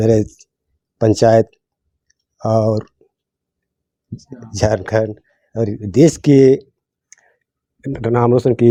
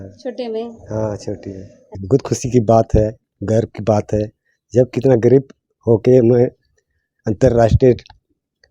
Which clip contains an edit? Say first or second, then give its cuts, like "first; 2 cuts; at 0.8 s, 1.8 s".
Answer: second; 1 cut; at 2.0 s